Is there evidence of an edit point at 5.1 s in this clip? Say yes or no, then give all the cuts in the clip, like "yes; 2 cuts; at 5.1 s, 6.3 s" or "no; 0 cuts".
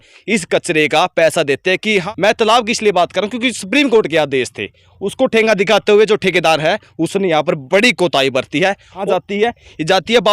no; 2 cuts; at 2.0 s, 9.0 s